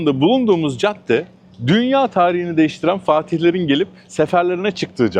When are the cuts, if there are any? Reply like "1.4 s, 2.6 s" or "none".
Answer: none